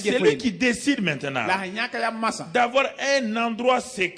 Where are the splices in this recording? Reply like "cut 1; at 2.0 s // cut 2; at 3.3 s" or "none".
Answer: none